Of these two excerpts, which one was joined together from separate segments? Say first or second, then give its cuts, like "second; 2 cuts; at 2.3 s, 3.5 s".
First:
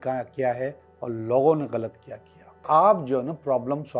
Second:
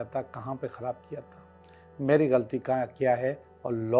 first; 1 cut; at 2.6 s